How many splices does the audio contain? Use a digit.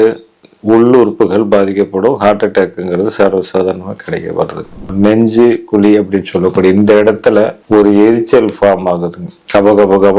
2